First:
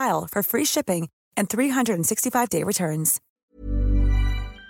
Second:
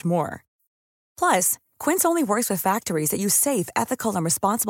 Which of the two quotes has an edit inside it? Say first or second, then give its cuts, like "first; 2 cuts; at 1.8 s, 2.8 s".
first; 1 cut; at 3.3 s